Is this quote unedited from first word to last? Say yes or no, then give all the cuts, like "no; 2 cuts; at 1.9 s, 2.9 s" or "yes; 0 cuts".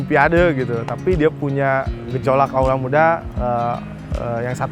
no; 1 cut; at 2.5 s